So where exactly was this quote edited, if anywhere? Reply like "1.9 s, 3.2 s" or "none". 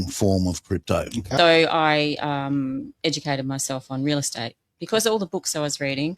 1.3 s